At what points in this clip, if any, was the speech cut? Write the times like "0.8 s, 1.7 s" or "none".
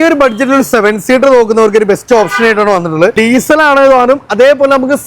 3.1 s